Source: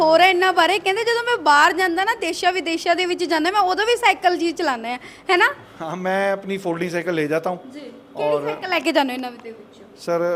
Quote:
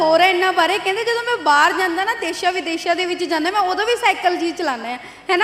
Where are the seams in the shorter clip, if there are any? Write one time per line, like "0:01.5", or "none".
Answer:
none